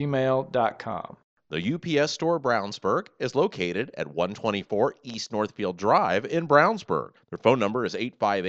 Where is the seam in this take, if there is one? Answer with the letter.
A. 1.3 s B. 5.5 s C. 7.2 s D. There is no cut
A